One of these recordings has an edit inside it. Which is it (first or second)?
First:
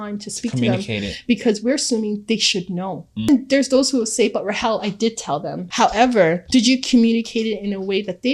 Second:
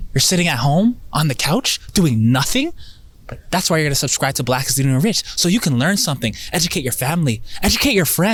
first